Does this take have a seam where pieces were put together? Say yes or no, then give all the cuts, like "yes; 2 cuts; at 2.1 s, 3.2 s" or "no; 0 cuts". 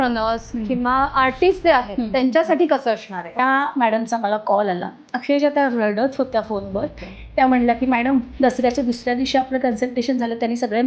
yes; 1 cut; at 3.4 s